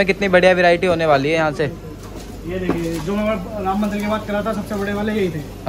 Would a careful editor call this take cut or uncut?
uncut